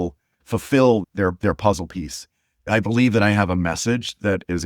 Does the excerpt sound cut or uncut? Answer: cut